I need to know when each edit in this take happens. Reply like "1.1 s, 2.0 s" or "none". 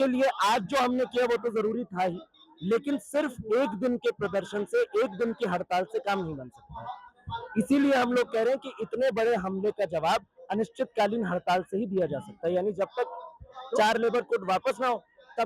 none